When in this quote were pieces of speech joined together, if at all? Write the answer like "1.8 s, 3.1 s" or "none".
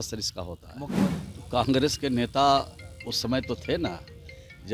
1.2 s